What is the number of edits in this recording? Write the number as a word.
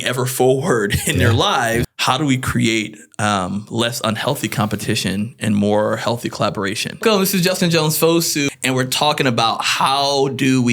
three